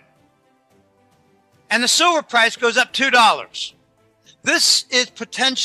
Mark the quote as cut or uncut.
cut